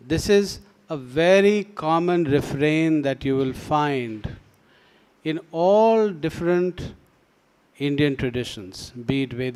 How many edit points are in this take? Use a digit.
0